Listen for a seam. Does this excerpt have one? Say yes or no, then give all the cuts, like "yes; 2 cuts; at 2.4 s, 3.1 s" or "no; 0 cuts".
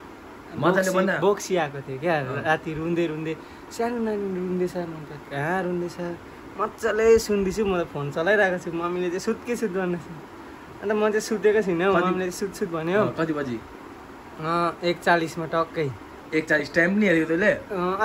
no; 0 cuts